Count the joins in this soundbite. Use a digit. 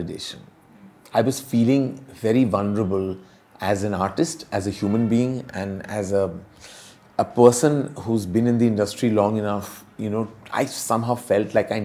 0